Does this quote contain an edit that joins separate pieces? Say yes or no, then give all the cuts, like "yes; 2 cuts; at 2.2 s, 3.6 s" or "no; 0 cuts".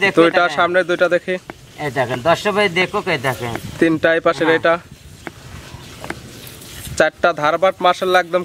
no; 0 cuts